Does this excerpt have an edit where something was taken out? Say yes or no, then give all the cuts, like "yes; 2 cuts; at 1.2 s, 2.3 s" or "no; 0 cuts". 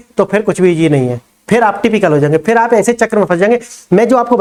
no; 0 cuts